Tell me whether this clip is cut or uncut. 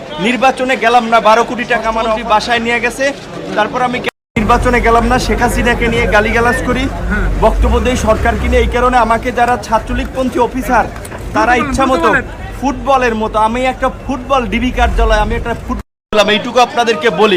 cut